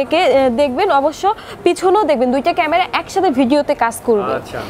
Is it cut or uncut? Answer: uncut